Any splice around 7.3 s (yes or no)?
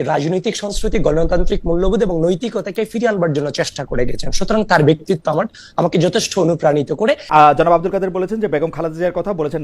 yes